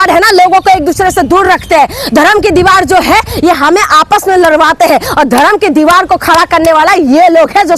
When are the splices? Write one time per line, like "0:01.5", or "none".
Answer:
none